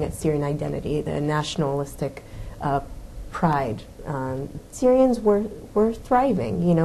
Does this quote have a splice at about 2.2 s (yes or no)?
no